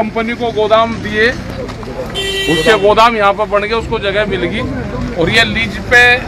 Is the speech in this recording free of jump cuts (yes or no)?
yes